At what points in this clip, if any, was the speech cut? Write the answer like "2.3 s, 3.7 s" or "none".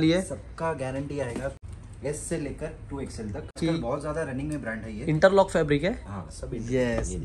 1.6 s, 3.6 s